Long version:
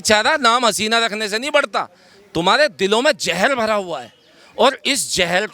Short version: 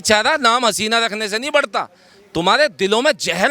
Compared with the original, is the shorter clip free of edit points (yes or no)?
yes